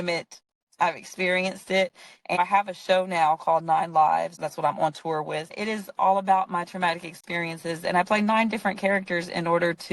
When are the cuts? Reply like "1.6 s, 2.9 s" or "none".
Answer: 2.4 s, 4.3 s, 5.5 s